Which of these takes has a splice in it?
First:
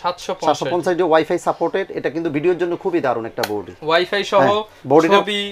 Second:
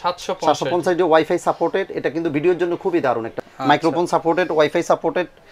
second; 1 cut; at 3.3 s

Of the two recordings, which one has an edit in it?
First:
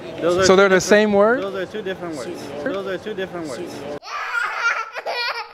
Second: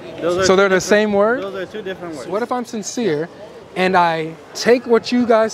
second; 1 cut; at 2.4 s

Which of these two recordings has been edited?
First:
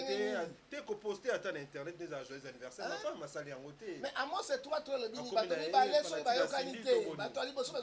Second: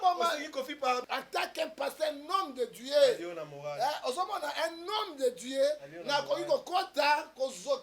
second; 1 cut; at 1.0 s

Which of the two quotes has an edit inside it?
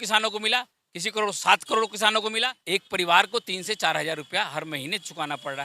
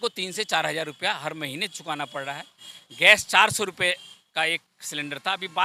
first; 1 cut; at 2.4 s

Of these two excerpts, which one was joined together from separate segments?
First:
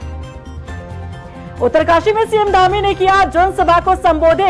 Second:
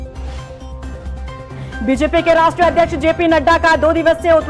first; 1 cut; at 1.0 s

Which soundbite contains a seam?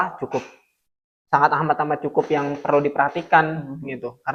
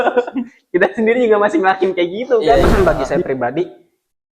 second; 1 cut; at 2.6 s

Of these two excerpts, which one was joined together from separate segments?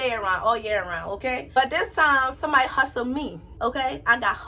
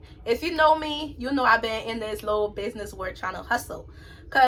first; 2 cuts; at 1.6 s, 3.4 s

